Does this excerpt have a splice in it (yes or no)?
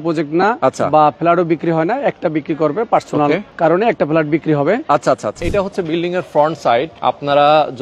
yes